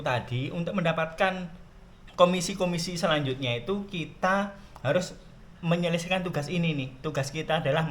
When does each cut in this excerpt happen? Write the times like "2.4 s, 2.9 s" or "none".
1.6 s